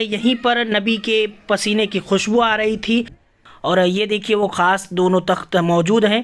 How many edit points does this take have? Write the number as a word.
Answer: one